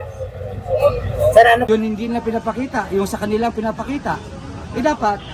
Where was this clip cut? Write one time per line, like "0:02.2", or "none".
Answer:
0:01.6